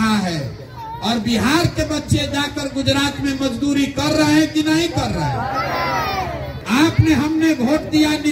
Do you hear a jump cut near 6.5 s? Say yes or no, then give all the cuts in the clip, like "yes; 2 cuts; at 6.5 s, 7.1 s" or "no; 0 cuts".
yes; 1 cut; at 6.5 s